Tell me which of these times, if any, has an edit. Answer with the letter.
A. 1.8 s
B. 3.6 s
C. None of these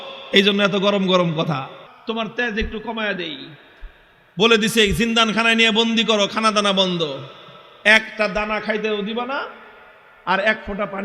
A